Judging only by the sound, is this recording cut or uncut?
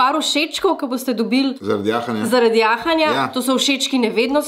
uncut